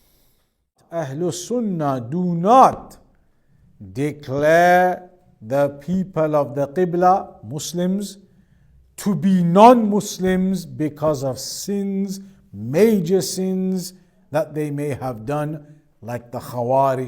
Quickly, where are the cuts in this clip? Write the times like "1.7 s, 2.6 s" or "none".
1.1 s